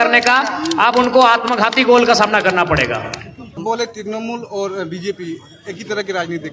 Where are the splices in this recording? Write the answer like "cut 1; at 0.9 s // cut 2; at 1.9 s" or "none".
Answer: cut 1; at 3.6 s